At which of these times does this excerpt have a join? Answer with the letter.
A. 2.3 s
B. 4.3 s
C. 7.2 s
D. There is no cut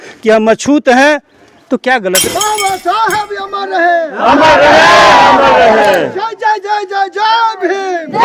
A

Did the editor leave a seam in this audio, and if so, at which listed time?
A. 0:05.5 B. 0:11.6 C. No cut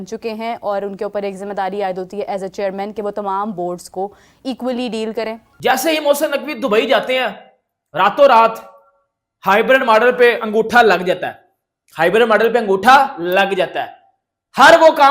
A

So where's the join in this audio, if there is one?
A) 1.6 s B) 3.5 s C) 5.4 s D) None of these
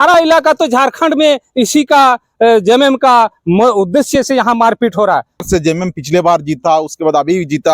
C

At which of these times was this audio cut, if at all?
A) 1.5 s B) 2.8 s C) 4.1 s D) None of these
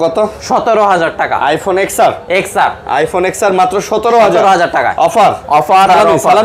D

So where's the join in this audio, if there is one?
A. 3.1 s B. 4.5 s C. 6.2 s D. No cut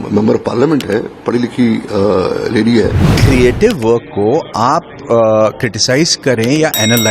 A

